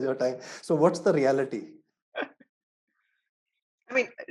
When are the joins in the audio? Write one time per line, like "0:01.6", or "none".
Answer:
none